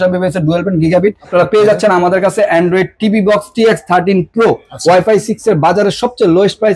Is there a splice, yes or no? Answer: yes